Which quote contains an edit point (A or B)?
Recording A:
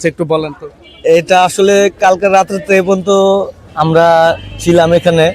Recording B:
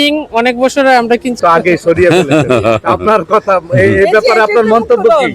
B